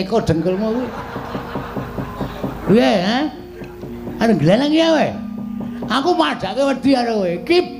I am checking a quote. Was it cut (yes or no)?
no